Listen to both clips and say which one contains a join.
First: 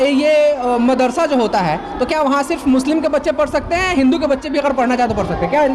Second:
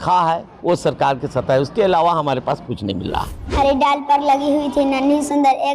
second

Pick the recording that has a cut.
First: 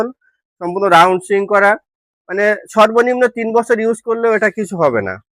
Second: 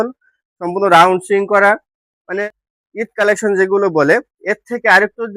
second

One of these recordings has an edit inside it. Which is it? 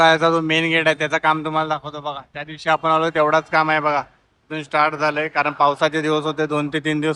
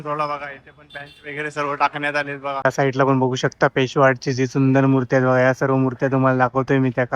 second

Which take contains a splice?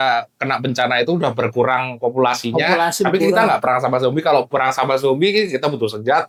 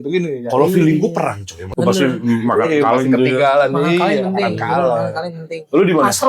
second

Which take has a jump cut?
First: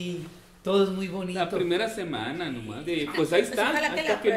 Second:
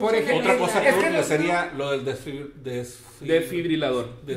first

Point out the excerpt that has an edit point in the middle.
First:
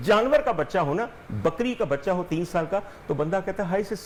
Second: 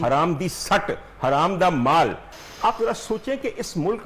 second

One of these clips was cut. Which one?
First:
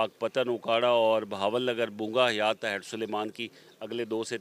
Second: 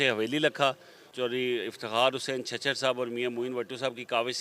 second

